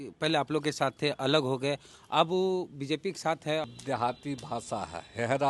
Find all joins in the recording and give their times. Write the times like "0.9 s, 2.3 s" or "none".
3.6 s

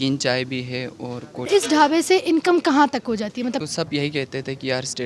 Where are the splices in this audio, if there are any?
1.5 s, 3.6 s

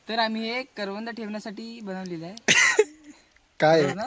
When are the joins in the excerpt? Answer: none

